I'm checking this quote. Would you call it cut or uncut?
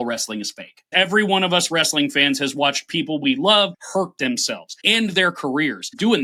uncut